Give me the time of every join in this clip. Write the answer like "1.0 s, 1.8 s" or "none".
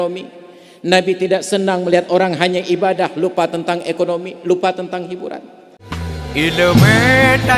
6.0 s